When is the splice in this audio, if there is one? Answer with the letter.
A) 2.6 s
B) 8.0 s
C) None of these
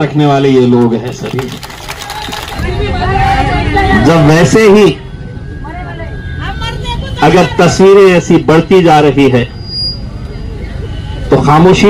A